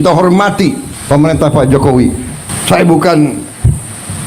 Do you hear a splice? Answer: yes; 2 cuts; at 0.9 s, 2.5 s

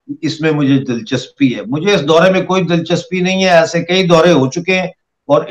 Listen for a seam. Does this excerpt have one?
no; 0 cuts

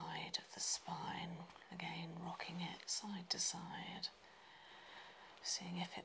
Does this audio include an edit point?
no; 0 cuts

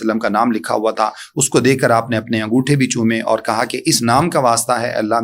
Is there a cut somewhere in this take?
no; 0 cuts

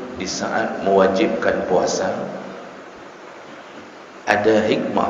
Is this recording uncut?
yes; 0 cuts

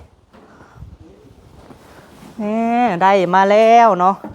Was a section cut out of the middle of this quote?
yes; 1 cut; at 1.5 s

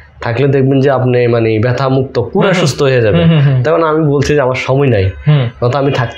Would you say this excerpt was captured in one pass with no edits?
yes; 0 cuts

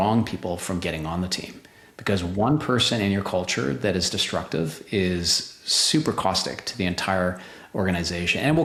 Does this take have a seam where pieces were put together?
no; 0 cuts

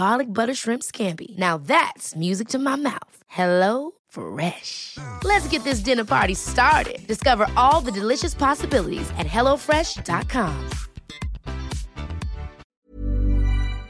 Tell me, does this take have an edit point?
yes; 1 cut; at 12.7 s

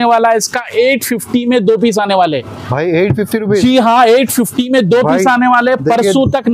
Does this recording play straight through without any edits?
yes; 0 cuts

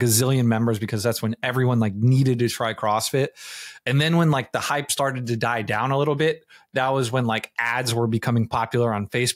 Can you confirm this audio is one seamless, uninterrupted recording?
yes; 0 cuts

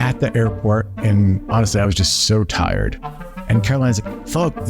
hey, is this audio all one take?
no; 1 cut; at 0.9 s

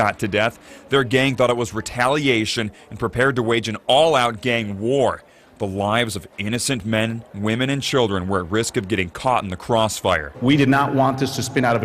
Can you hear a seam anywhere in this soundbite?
no; 0 cuts

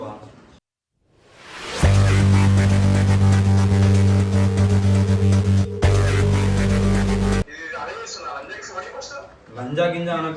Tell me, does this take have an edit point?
yes; 1 cut; at 7.6 s

